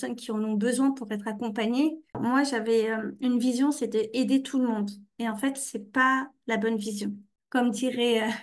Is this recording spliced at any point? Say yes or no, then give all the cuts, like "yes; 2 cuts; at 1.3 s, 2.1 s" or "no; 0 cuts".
yes; 2 cuts; at 2.1 s, 7.3 s